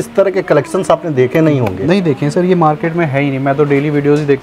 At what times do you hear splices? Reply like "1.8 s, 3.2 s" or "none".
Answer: none